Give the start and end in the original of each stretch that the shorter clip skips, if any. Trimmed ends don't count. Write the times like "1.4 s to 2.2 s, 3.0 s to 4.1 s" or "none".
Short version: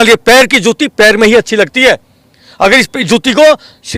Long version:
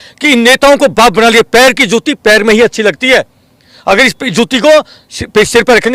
none